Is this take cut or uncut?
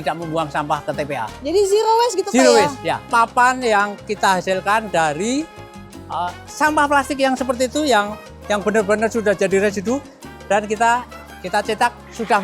cut